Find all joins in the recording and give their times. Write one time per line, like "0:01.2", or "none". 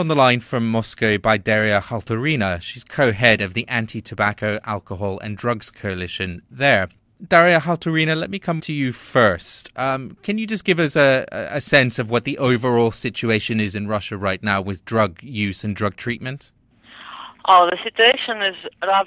0:12.3